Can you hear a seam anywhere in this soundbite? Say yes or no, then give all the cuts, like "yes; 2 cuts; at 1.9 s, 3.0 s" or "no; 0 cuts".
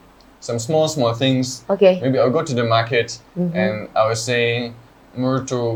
no; 0 cuts